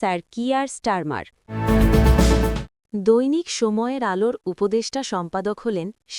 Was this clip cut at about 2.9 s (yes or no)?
no